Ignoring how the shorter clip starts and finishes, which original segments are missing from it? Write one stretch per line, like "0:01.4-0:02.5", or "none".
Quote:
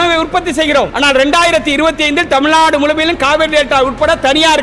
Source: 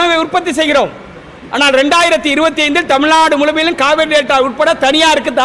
0:00.9-0:01.5